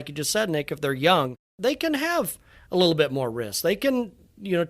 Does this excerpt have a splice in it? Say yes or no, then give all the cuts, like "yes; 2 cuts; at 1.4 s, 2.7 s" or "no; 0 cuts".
yes; 1 cut; at 1.5 s